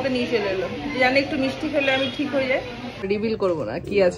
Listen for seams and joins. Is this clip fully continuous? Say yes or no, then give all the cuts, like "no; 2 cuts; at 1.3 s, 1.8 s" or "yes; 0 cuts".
no; 1 cut; at 3.0 s